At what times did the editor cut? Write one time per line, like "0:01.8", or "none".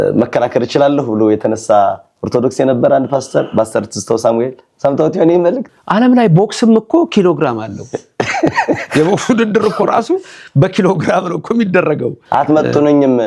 0:05.6
0:12.2